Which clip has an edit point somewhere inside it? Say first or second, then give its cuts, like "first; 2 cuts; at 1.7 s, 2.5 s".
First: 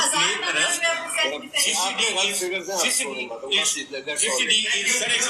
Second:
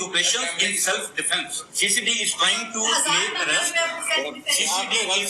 second; 1 cut; at 1.6 s